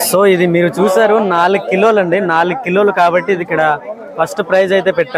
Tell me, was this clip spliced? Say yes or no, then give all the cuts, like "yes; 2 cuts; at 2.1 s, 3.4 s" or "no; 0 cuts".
no; 0 cuts